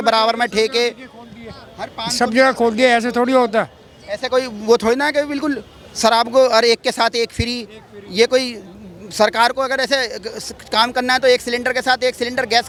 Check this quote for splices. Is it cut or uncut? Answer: uncut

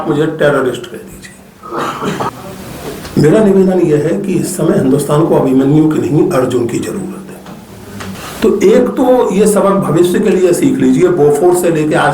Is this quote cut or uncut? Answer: cut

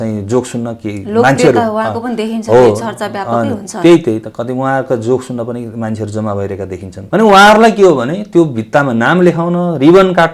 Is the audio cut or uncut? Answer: cut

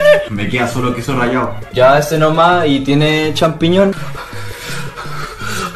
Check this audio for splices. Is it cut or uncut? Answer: cut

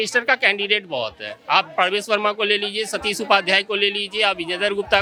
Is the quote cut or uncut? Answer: uncut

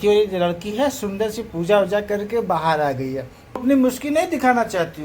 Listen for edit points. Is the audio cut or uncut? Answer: cut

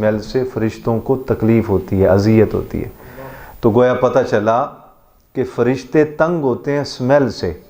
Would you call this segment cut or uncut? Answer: uncut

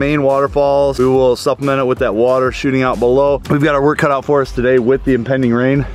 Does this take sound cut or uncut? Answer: cut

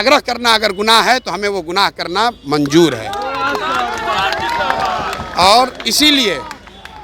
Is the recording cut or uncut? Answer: uncut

